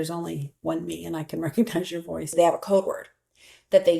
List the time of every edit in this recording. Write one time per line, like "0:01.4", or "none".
0:02.3